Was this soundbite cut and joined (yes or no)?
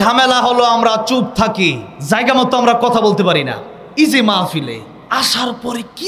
yes